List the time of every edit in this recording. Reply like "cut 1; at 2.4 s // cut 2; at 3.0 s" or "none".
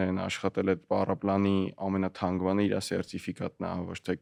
none